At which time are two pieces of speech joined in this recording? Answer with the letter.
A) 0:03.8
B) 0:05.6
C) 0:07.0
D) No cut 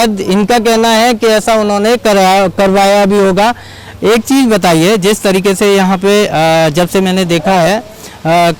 D